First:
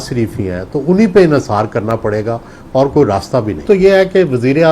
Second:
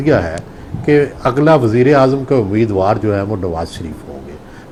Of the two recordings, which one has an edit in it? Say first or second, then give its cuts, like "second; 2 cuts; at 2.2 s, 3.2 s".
first; 1 cut; at 3.6 s